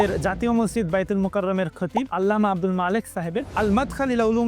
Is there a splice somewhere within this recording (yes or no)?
yes